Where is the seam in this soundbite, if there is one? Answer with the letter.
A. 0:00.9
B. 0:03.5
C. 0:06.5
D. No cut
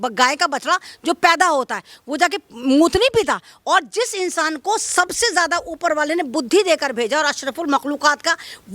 D